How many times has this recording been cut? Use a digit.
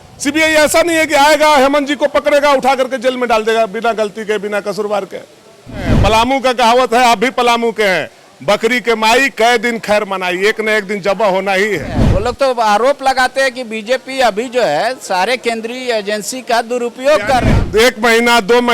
3